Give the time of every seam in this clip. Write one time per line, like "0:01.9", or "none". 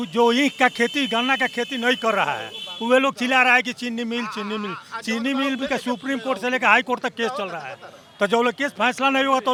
none